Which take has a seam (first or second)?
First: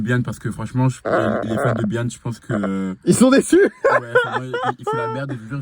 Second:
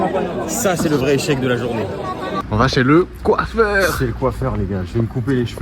second